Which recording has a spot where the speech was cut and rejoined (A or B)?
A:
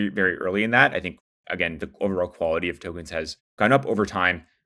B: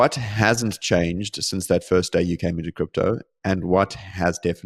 A